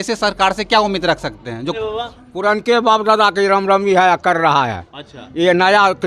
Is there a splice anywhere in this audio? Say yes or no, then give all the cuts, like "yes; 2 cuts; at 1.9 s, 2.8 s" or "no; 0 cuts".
yes; 1 cut; at 1.8 s